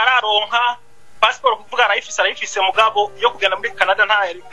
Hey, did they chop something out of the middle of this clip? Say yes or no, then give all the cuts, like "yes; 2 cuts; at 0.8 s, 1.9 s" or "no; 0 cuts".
no; 0 cuts